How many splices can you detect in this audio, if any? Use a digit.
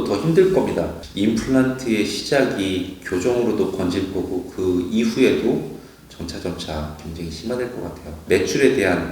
2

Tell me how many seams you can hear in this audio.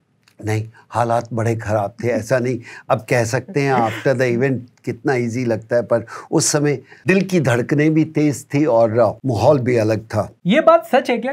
3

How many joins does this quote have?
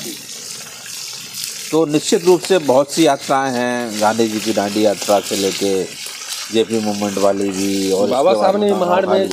0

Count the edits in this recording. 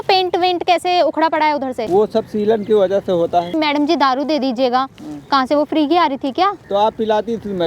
3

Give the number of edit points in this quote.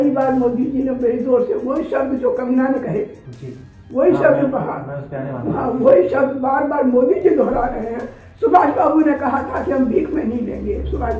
0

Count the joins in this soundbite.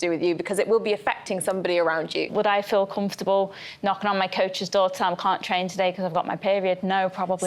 1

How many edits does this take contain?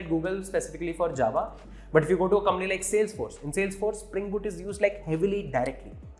1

